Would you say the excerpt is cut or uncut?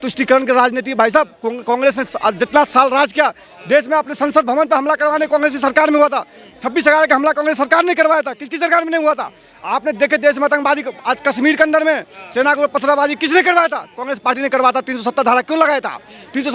uncut